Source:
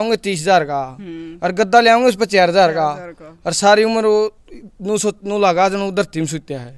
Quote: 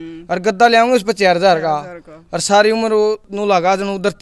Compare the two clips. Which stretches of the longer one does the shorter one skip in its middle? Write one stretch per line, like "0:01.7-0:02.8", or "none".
0:04.4-0:05.2